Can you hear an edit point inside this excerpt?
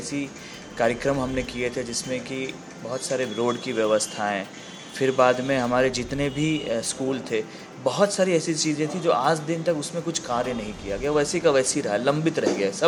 no; 0 cuts

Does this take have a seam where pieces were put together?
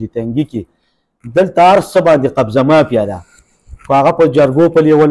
no; 0 cuts

